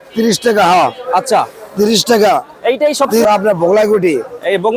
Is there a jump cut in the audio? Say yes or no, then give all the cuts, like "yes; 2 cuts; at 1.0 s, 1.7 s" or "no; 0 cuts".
yes; 1 cut; at 3.2 s